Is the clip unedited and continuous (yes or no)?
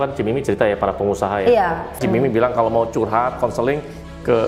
no